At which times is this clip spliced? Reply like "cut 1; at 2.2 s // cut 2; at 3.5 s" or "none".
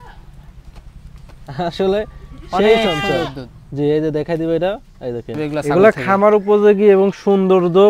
cut 1; at 5.4 s